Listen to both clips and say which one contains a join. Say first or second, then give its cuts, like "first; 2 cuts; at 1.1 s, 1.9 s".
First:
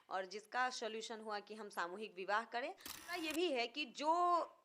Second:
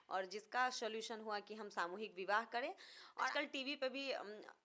first; 1 cut; at 3.2 s